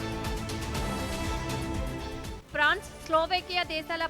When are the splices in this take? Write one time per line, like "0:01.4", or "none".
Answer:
0:01.8

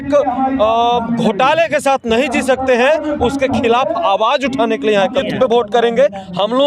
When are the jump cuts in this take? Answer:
0:05.3

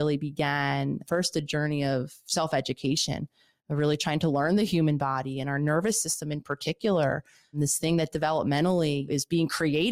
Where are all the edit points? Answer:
0:01.0
0:07.6
0:09.1

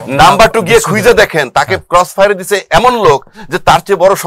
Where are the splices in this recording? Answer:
none

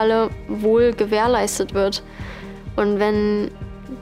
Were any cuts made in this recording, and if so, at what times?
none

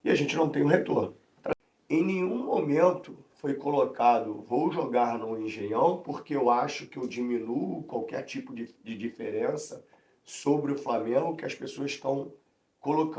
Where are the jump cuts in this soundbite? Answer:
0:01.3

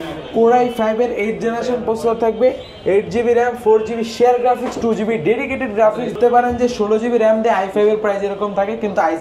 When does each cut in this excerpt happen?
0:06.2

